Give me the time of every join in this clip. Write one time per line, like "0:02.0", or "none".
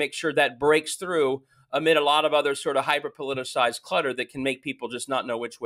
none